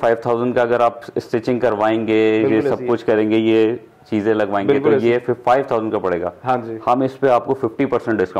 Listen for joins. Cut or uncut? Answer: uncut